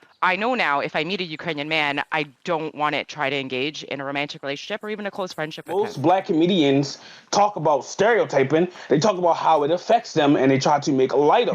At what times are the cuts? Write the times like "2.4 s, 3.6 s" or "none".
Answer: 5.7 s

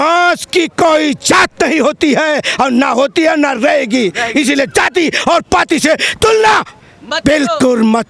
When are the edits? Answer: none

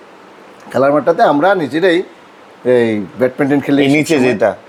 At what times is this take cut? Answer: none

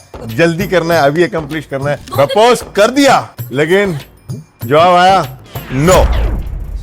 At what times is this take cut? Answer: 2.0 s, 3.3 s

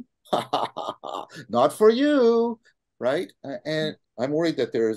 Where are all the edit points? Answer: 2.7 s, 4.1 s

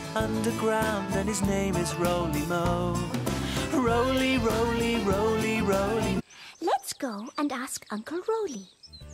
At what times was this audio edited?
none

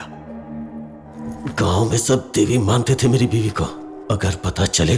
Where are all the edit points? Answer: 1.1 s

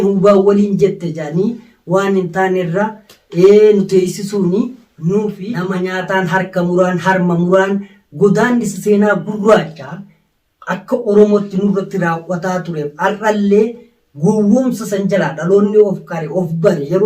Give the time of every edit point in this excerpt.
5.5 s

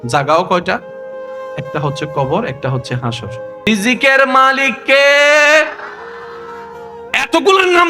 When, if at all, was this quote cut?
3.7 s

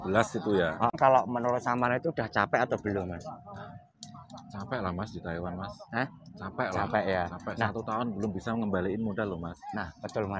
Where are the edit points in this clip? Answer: 0.9 s

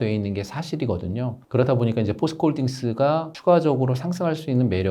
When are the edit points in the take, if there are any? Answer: none

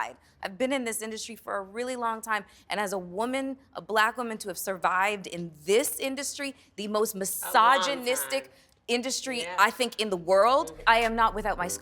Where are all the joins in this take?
10.7 s

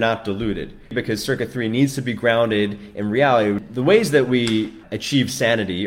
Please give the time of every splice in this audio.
0.9 s, 3.7 s, 4.9 s

